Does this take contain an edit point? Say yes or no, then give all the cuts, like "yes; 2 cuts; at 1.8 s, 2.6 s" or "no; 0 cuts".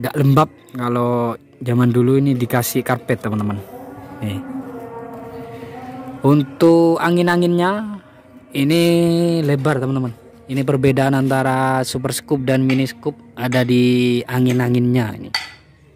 no; 0 cuts